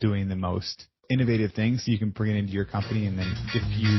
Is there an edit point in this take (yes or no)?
yes